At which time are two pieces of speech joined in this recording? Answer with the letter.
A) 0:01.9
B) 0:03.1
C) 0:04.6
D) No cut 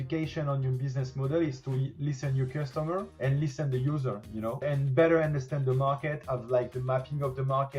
C